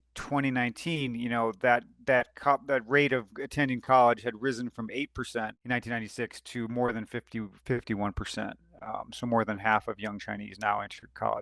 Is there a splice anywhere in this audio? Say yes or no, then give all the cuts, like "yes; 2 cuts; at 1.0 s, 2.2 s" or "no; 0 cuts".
no; 0 cuts